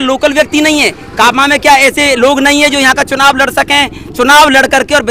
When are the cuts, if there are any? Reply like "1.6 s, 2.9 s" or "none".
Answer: none